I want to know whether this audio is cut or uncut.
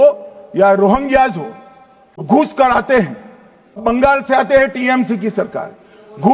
cut